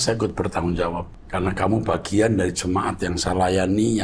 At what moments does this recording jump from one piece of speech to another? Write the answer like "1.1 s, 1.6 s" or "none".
1.2 s